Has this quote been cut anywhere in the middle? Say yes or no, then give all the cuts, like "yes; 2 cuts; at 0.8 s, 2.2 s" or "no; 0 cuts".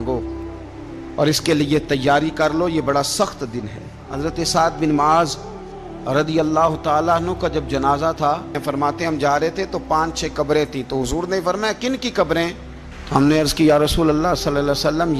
yes; 2 cuts; at 4.0 s, 8.6 s